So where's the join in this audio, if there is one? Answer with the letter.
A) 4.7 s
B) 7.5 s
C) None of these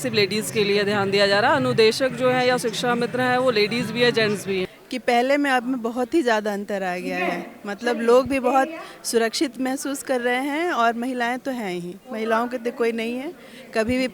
A